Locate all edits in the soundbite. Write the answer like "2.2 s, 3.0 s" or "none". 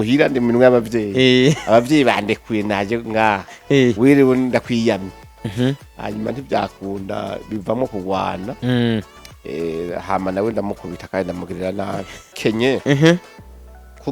12.4 s